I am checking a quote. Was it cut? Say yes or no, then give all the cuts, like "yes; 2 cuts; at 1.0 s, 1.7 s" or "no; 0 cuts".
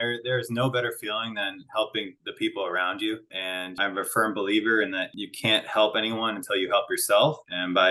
yes; 1 cut; at 3.8 s